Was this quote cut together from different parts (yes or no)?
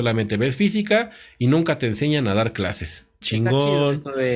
yes